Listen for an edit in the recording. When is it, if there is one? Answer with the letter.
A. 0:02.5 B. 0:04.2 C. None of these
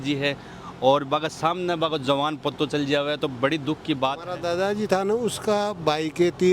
B